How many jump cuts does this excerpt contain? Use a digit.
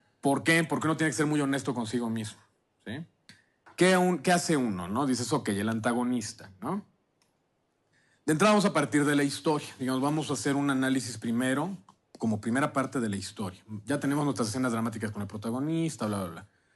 0